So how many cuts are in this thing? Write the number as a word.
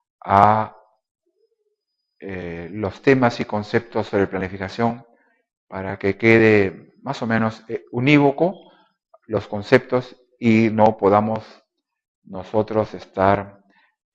one